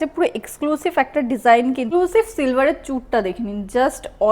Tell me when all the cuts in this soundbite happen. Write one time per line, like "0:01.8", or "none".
0:01.8